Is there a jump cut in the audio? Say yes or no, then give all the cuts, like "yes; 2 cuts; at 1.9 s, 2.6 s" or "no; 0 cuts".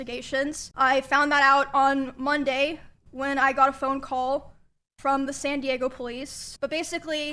yes; 1 cut; at 6.4 s